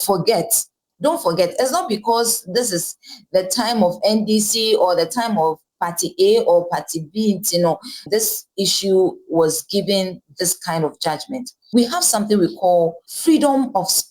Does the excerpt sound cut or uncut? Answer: cut